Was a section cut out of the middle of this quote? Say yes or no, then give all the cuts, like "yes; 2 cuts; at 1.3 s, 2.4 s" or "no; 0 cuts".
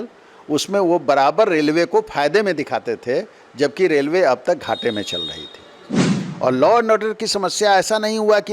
yes; 1 cut; at 5.9 s